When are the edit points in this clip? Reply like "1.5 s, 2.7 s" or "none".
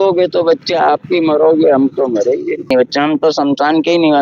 2.7 s